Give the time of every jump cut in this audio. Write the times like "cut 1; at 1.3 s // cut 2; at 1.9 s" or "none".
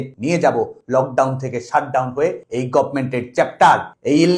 none